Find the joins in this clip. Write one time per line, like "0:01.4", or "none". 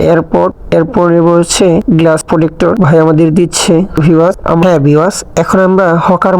0:04.6